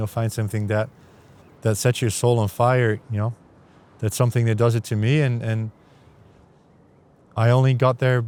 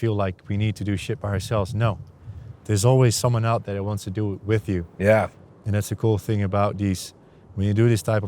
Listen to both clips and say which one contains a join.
second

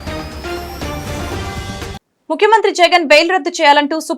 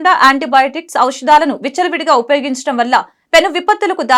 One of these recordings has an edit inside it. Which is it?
first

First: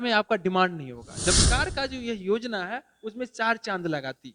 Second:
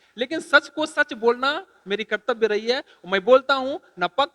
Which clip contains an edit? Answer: first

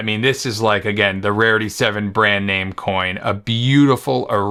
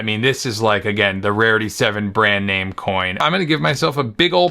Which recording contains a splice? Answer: second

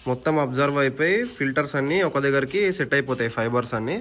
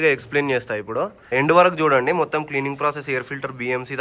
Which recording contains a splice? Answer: second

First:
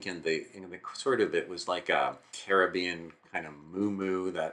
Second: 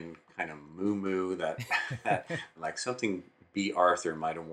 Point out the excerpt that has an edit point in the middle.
second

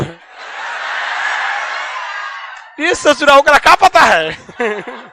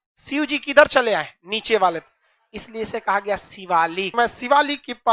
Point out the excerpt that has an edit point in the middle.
second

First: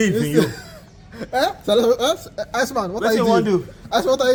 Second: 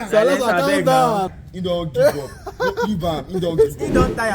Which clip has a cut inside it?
second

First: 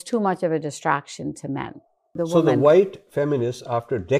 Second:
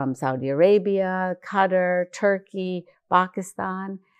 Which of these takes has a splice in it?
first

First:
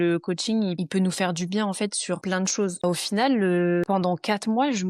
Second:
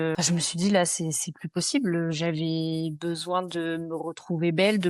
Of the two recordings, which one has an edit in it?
first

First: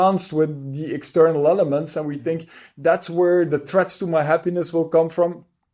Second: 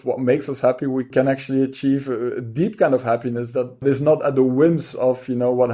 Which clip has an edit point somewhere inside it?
second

